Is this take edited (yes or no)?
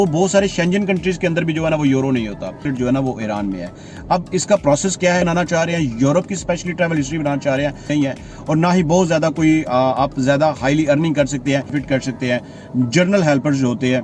yes